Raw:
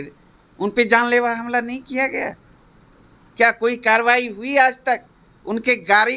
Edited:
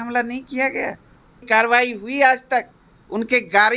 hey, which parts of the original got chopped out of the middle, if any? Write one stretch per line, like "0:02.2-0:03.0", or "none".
0:02.8-0:03.8